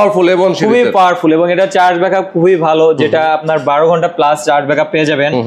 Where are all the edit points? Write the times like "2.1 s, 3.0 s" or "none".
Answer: none